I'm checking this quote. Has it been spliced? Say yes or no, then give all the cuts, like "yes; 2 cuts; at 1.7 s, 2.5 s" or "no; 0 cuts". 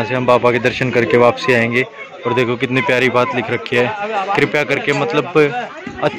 no; 0 cuts